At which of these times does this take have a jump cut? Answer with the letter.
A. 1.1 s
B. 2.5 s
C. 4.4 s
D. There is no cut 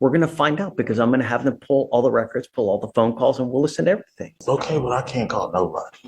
C